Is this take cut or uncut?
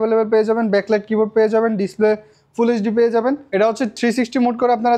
cut